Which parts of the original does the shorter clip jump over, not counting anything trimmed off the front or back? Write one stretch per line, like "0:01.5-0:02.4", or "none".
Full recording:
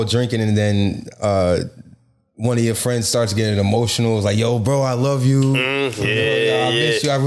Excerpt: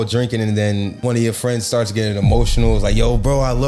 0:00.9-0:02.3